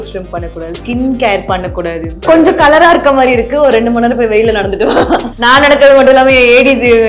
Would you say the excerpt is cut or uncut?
cut